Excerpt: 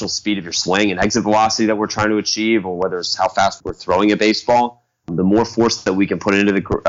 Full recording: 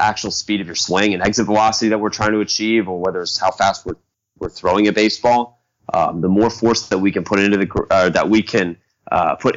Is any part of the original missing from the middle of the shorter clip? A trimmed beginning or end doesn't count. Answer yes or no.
yes